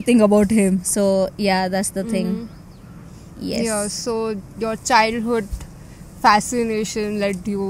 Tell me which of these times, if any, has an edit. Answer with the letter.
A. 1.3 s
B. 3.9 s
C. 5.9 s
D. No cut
D